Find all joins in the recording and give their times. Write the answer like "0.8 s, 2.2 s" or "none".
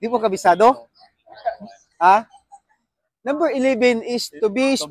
0.9 s